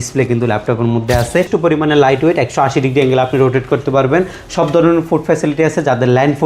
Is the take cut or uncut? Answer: cut